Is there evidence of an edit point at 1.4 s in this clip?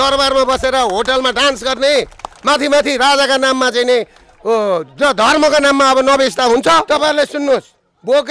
no; 1 cut; at 6.9 s

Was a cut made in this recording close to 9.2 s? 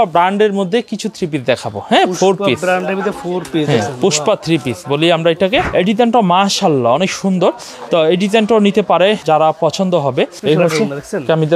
yes; 3 cuts; at 5.7 s, 9.2 s, 10.4 s

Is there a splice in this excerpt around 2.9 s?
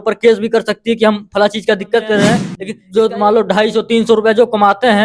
yes; 1 cut; at 2.9 s

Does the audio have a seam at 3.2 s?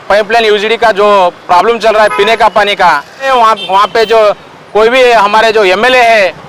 yes; 1 cut; at 3.2 s

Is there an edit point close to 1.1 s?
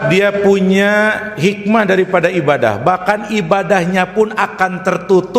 no; 0 cuts

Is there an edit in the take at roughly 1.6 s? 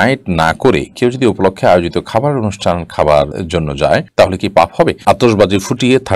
no; 2 cuts; at 3.4 s, 5.0 s

